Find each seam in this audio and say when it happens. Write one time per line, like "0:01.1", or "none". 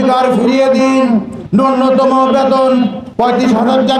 0:01.4
0:03.0